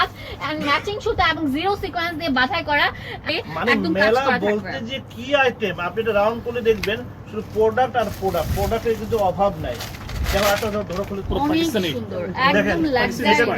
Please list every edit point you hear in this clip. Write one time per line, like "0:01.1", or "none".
0:03.3
0:11.2